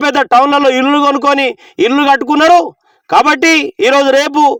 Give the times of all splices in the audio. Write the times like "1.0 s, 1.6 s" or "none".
none